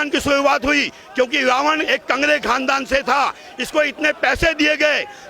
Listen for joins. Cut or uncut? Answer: uncut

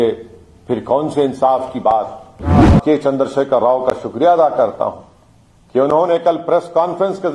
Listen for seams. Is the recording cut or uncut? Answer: cut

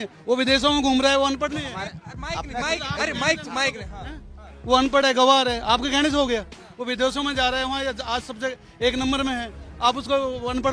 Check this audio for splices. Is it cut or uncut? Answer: uncut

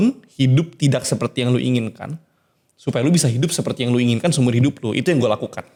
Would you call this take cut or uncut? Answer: uncut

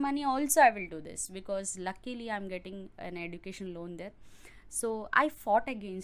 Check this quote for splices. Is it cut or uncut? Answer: uncut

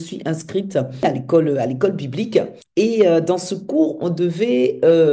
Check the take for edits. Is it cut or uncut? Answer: cut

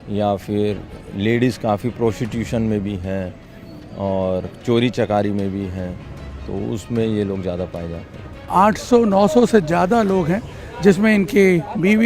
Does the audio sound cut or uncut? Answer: cut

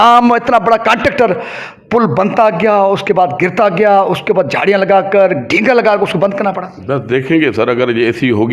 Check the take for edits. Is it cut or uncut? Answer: uncut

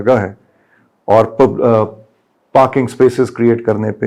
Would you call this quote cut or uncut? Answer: uncut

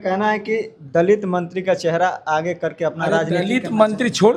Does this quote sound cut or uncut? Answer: uncut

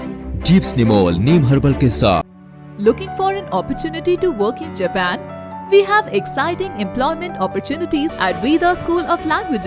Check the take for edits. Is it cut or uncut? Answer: cut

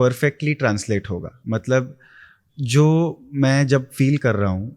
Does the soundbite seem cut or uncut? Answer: uncut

